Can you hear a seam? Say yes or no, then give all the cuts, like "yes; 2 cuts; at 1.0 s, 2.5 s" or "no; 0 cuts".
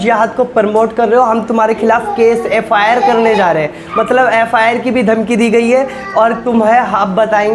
no; 0 cuts